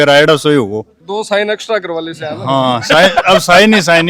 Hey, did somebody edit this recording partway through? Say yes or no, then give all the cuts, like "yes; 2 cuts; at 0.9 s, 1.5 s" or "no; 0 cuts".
no; 0 cuts